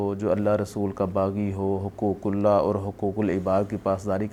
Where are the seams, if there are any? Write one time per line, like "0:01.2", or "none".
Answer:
none